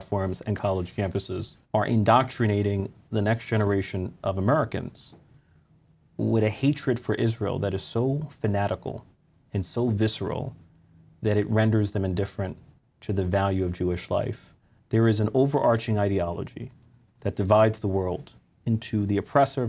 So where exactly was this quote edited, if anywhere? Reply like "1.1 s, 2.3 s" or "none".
1.5 s